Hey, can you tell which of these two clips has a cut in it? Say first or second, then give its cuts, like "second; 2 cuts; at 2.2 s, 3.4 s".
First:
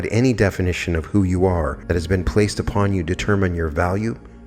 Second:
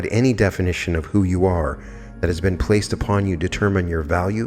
first; 1 cut; at 1.8 s